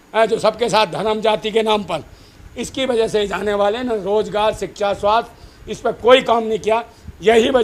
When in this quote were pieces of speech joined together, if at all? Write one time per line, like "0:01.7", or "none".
none

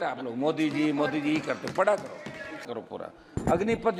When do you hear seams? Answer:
0:02.7

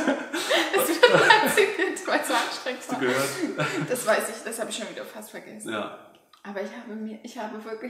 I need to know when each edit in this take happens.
none

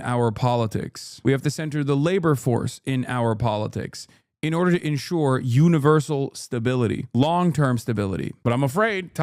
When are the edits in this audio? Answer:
none

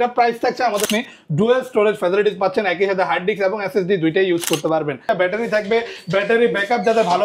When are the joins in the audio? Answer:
0:00.9
0:05.0

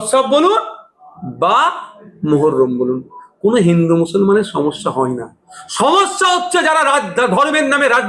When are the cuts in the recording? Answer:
none

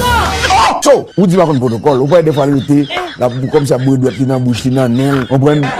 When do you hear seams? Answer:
0:01.0

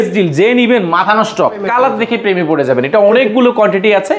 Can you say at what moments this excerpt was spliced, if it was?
0:01.7

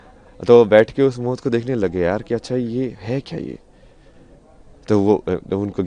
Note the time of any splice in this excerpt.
none

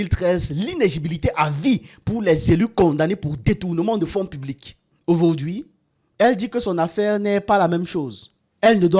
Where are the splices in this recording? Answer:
none

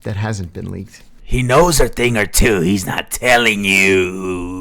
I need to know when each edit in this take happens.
0:00.9

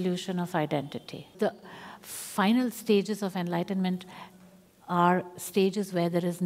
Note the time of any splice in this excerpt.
0:01.3

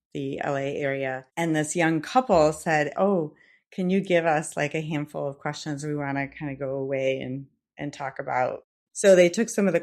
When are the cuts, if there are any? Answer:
0:01.2
0:08.7

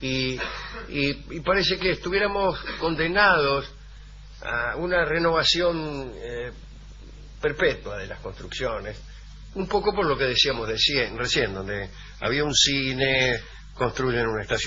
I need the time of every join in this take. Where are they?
none

